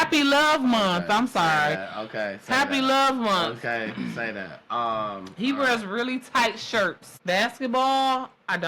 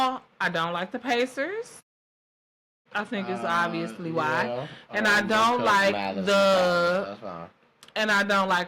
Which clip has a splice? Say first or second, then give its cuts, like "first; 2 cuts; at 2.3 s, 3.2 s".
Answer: first; 1 cut; at 7.1 s